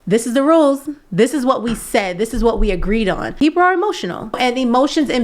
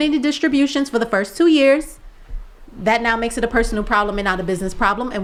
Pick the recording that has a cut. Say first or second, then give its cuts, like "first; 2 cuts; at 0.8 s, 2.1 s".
first; 2 cuts; at 3.3 s, 4.3 s